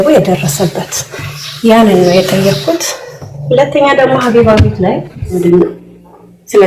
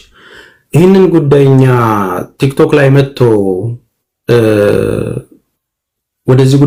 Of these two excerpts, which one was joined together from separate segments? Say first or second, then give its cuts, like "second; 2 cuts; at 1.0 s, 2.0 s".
first; 1 cut; at 5.4 s